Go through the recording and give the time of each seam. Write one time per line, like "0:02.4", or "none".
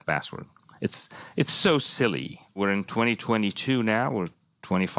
0:02.6

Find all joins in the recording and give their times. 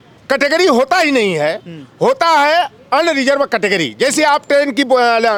none

